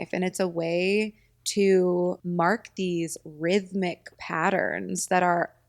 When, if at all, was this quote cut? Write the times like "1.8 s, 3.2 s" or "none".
2.2 s